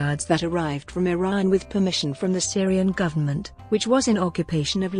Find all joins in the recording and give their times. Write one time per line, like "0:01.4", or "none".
none